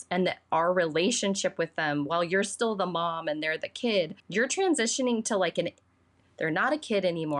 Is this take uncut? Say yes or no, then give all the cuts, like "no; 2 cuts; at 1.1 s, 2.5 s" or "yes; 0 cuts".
no; 1 cut; at 4.2 s